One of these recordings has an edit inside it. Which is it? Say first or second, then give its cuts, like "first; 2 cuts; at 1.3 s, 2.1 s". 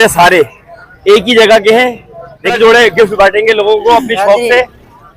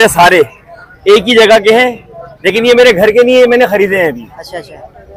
first; 1 cut; at 2.5 s